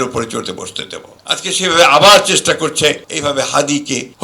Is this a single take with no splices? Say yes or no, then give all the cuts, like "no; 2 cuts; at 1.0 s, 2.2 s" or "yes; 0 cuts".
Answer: no; 1 cut; at 1.1 s